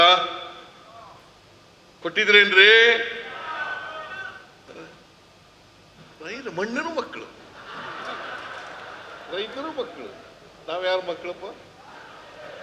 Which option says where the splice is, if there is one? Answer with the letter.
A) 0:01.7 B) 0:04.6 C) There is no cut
C